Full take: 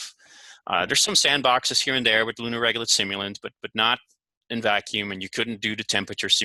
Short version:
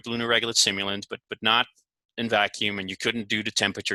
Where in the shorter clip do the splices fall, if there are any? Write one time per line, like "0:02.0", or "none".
none

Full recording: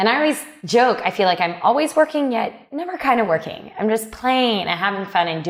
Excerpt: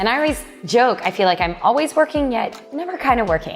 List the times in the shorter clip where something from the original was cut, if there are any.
none

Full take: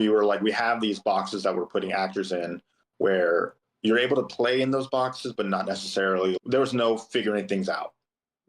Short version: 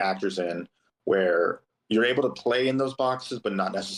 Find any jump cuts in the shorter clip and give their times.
none

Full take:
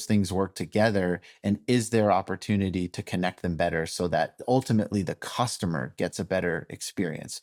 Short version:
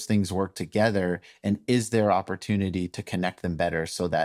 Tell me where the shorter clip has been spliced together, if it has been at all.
none

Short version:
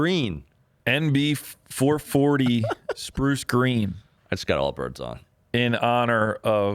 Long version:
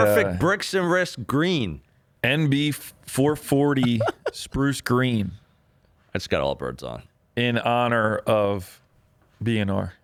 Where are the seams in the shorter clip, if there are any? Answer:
0:04.1

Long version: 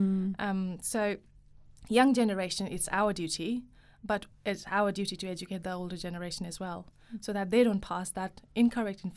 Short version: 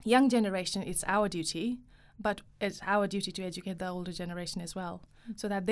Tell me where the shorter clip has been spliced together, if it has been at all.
none

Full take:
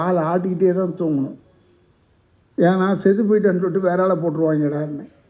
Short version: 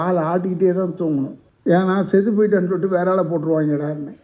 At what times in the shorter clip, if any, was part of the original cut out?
0:01.4

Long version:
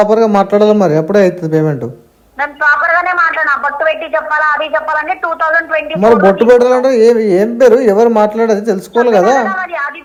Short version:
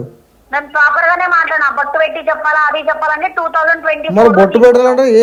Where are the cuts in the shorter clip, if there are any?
none

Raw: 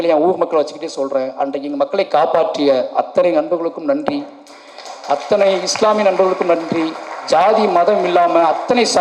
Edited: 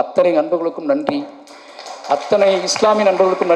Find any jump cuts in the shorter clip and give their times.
none

